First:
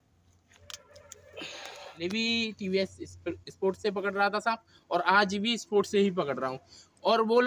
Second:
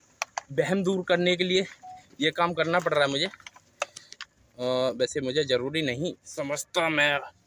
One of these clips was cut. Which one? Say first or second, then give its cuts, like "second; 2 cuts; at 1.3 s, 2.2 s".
first; 1 cut; at 2.0 s